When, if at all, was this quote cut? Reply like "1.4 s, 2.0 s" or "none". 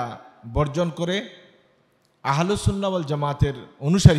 none